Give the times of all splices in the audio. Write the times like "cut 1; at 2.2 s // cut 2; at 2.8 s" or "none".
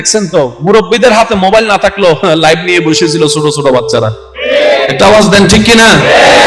none